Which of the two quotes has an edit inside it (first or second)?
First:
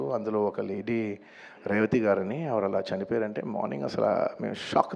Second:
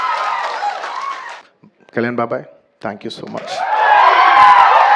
second